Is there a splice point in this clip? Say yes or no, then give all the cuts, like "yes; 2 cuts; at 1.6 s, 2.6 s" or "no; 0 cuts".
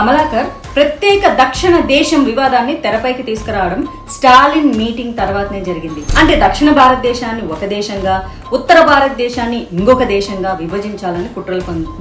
yes; 1 cut; at 6.0 s